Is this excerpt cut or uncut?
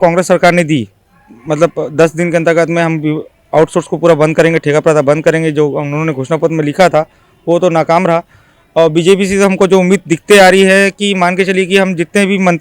uncut